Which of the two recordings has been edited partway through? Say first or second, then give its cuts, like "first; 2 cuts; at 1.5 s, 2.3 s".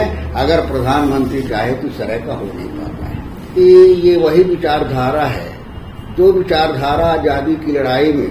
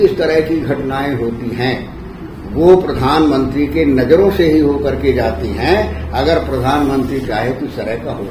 first; 1 cut; at 3.6 s